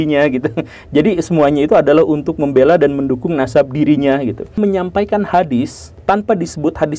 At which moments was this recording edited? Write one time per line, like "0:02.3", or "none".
0:04.6
0:05.9